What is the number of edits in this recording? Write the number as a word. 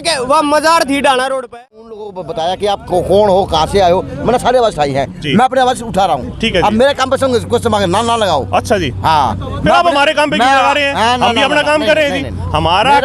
one